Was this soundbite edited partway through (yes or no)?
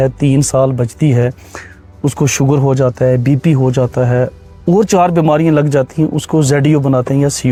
no